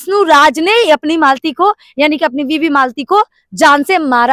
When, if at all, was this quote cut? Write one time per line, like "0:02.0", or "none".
none